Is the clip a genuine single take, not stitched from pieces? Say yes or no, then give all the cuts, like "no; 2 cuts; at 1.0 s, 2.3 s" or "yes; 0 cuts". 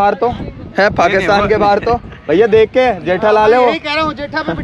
yes; 0 cuts